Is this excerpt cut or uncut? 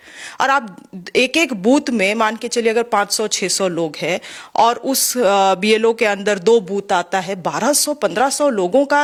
uncut